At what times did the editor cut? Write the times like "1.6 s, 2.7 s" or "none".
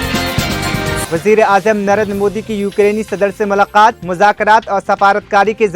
1.1 s